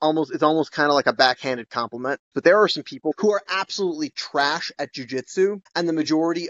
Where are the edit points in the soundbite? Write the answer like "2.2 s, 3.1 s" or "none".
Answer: 2.3 s, 3.1 s